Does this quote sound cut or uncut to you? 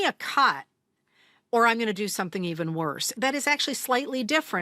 cut